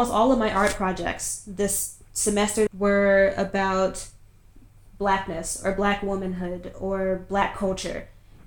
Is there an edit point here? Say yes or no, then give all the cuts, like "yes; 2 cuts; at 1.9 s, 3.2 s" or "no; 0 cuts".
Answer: yes; 1 cut; at 2.7 s